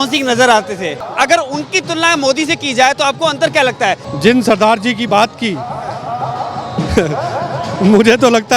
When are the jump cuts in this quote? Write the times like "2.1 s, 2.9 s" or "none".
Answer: 1.0 s, 4.1 s